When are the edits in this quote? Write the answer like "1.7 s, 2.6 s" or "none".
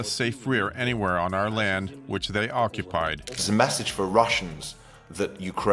3.3 s